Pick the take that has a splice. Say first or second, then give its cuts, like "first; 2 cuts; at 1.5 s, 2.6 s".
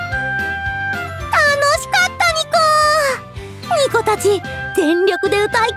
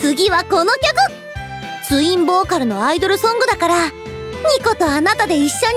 first; 1 cut; at 1.2 s